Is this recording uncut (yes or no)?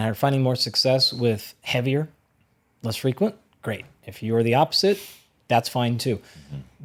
yes